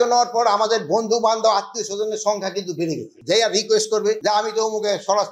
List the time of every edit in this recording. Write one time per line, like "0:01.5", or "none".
0:03.2

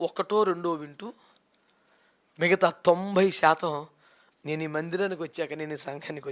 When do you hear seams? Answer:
none

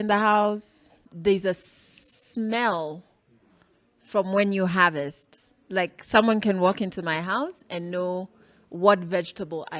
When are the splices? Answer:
0:01.1

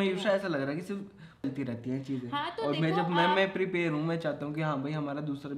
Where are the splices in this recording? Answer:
0:01.4

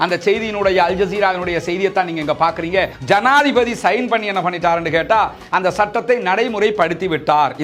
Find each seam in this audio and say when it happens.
0:02.9

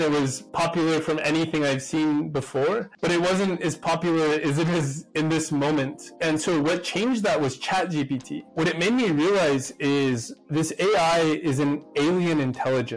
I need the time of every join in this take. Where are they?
0:08.5

